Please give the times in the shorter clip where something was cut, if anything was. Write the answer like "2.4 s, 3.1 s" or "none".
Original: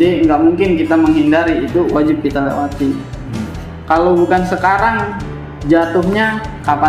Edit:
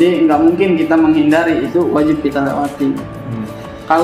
none